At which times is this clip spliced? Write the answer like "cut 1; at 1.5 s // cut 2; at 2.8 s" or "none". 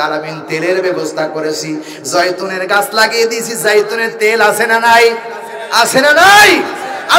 none